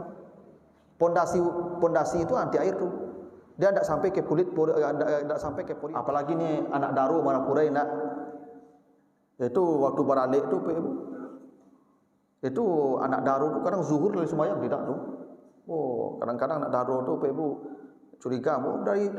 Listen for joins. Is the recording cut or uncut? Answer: cut